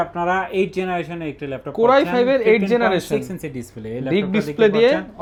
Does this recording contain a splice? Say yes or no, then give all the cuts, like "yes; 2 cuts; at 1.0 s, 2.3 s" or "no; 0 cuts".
no; 0 cuts